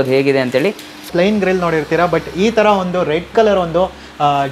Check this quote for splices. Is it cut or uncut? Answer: cut